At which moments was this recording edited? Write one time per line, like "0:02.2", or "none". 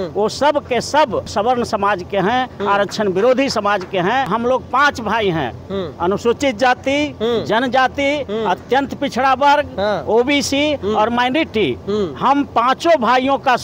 0:01.3
0:04.3